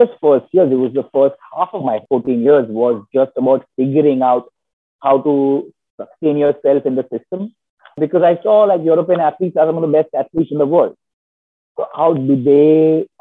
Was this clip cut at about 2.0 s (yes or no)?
yes